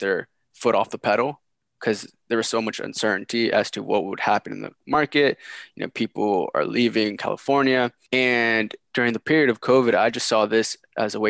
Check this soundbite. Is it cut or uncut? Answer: uncut